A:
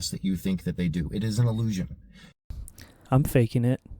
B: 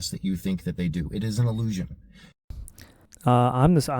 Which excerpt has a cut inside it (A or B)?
A